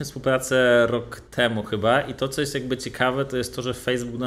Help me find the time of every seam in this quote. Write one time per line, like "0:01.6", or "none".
none